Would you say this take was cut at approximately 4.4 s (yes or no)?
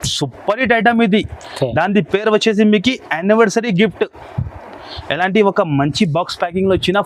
no